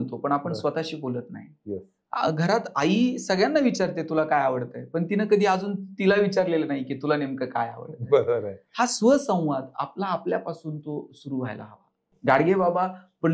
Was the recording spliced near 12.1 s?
yes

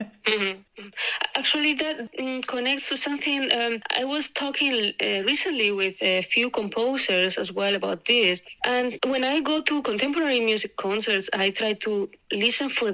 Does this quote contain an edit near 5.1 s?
no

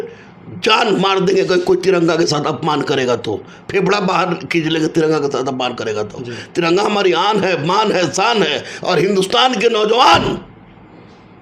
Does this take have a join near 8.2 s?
no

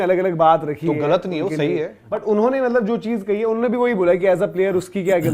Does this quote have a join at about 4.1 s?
no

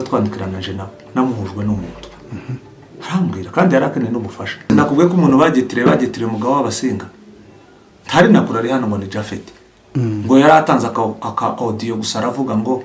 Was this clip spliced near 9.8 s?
no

